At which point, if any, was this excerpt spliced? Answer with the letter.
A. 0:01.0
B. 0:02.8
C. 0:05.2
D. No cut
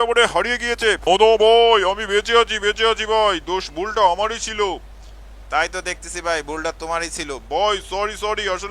A